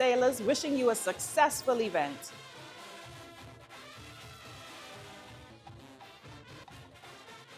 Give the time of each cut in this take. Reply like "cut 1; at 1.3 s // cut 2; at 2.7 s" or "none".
cut 1; at 5.5 s // cut 2; at 6.6 s